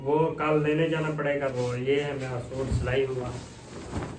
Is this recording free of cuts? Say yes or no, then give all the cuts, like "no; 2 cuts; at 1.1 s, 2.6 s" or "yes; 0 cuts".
no; 1 cut; at 1.5 s